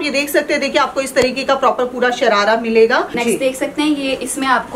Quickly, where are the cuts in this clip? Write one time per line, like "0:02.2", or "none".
0:03.1